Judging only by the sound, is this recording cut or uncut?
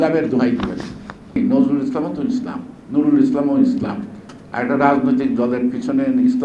cut